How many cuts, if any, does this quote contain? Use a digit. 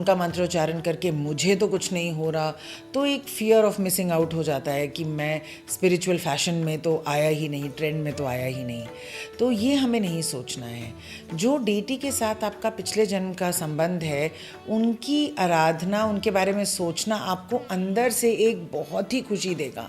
0